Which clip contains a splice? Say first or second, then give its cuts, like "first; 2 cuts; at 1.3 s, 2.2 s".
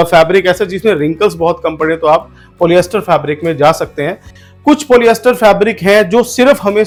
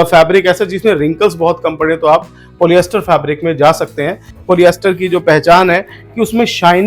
second; 1 cut; at 4.4 s